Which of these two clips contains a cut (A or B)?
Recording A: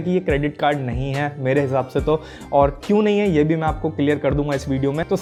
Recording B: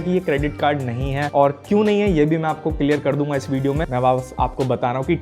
B